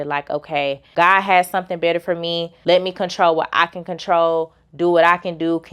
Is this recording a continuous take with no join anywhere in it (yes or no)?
no